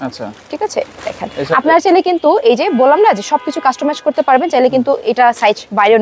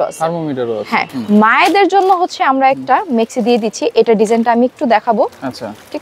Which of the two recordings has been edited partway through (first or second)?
second